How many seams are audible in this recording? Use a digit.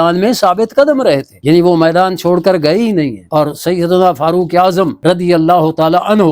0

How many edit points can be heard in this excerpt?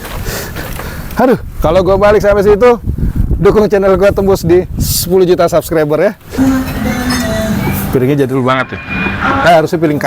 1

